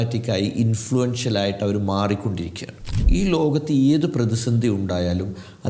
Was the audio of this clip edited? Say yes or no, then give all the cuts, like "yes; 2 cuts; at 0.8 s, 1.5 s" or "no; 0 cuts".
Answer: yes; 1 cut; at 3.0 s